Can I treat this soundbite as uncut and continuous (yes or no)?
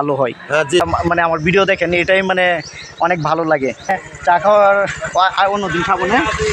no